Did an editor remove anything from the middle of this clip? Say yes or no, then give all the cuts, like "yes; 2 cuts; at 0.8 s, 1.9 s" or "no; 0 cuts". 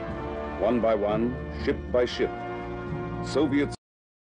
no; 0 cuts